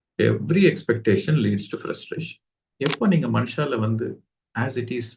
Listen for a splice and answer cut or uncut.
cut